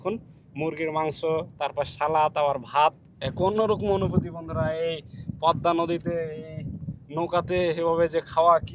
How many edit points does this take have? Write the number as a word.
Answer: one